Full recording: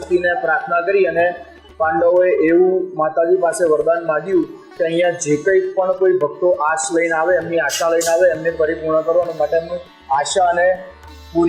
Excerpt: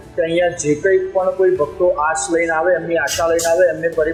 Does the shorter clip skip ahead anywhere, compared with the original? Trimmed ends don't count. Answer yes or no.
no